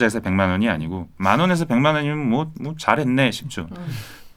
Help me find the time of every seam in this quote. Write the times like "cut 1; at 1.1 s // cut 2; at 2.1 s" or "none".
none